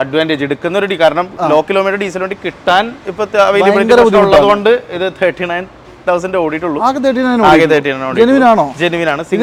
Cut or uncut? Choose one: uncut